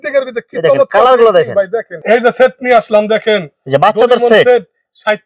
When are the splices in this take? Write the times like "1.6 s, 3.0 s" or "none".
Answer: 1.9 s